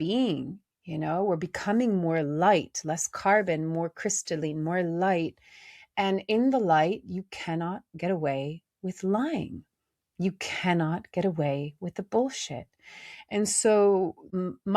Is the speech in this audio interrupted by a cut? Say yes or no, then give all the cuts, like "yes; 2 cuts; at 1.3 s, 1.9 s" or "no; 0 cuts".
no; 0 cuts